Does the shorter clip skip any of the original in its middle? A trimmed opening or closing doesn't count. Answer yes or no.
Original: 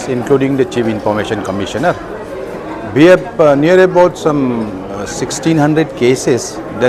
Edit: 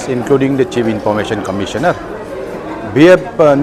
no